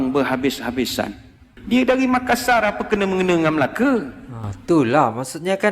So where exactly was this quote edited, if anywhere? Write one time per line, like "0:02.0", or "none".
0:01.6